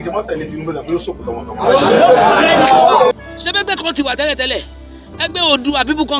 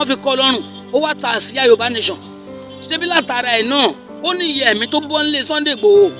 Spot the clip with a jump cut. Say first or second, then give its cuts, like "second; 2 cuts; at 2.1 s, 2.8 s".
first; 1 cut; at 3.1 s